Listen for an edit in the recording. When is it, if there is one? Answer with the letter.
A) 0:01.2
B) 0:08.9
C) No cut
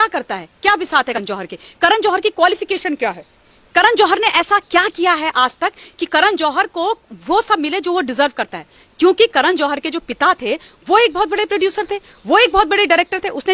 A